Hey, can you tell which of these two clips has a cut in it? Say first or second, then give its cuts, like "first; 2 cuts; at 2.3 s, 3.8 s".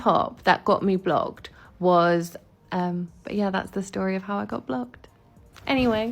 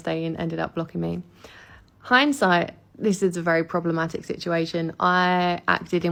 first; 1 cut; at 2.4 s